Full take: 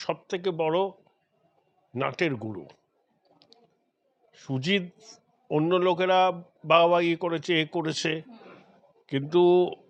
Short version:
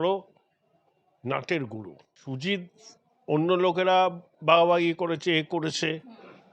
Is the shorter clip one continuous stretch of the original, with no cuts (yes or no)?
no